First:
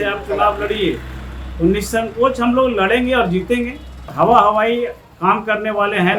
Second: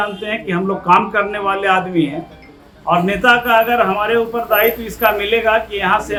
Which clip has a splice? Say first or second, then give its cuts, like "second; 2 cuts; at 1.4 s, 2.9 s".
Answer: first; 1 cut; at 4.1 s